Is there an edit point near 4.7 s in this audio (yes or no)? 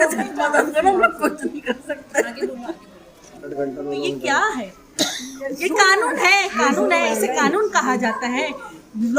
no